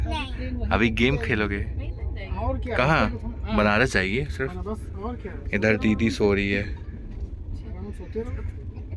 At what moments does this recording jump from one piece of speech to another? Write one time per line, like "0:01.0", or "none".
none